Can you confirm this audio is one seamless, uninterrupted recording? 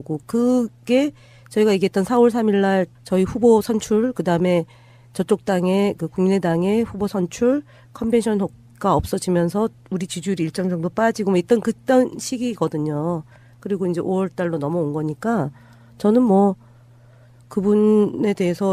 no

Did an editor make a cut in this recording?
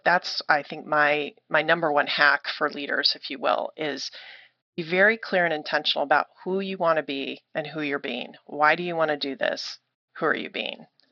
yes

